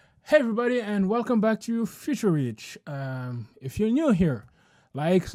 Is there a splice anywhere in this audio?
no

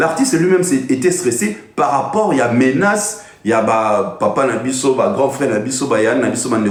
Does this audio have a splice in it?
no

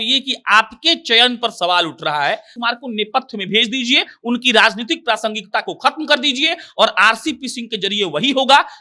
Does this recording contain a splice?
yes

